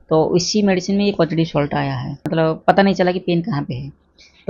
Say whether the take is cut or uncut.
cut